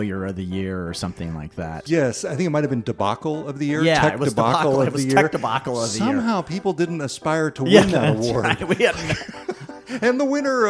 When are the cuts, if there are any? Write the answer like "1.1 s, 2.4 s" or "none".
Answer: 1.4 s